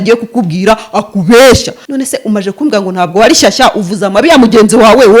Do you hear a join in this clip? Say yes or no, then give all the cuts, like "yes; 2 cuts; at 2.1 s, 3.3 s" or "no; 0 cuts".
yes; 1 cut; at 1.8 s